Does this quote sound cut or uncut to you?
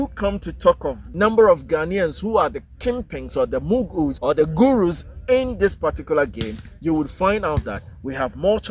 cut